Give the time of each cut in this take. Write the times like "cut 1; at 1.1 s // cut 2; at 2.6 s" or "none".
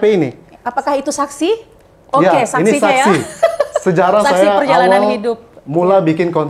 none

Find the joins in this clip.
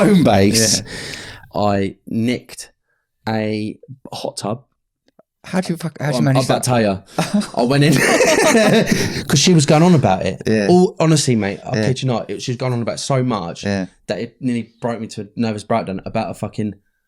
cut 1; at 1.4 s

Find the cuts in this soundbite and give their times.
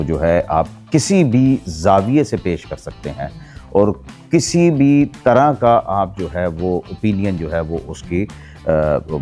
none

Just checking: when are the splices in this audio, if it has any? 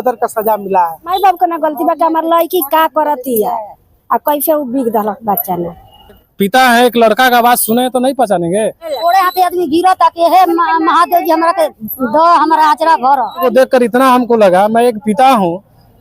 cut 1; at 1.1 s // cut 2; at 6.3 s // cut 3; at 8.9 s // cut 4; at 13.4 s

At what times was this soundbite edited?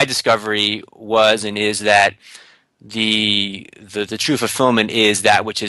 none

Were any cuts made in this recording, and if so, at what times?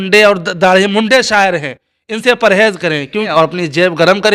cut 1; at 3.3 s

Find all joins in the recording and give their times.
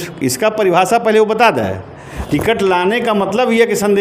cut 1; at 2.1 s

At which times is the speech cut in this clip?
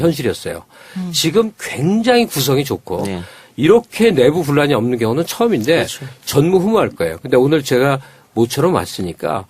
cut 1; at 8.0 s

